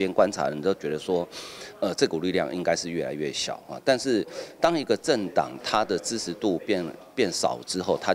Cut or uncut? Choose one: uncut